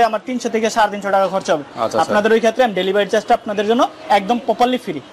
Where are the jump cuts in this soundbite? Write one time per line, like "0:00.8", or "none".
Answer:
none